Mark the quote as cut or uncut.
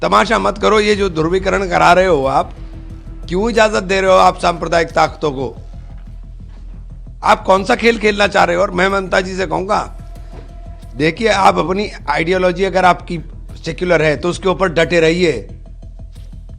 cut